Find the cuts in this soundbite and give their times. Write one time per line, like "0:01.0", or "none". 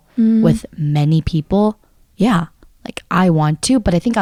none